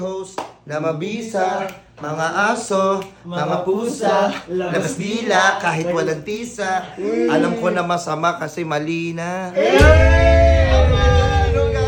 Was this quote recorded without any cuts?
yes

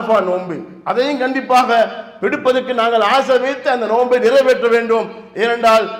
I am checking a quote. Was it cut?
no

